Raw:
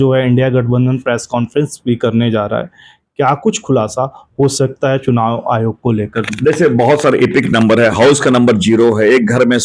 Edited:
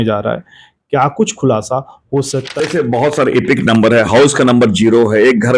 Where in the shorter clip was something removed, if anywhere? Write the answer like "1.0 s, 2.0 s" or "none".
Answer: 2.5 s